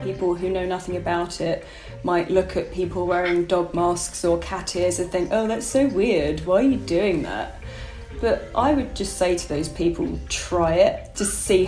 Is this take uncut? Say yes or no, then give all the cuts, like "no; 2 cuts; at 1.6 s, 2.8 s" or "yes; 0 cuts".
yes; 0 cuts